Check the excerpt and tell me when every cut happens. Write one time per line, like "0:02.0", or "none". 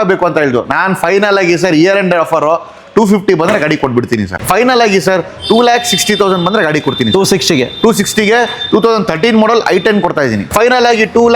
0:04.3
0:10.4